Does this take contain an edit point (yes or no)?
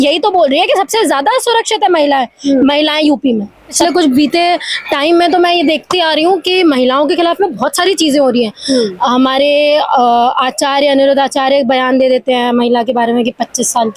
yes